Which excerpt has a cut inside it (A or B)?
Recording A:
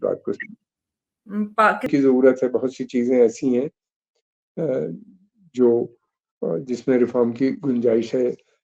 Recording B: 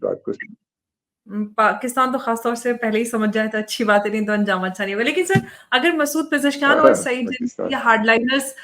A